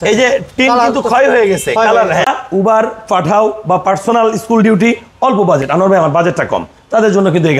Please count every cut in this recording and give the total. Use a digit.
1